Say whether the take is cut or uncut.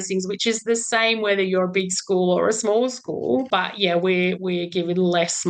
cut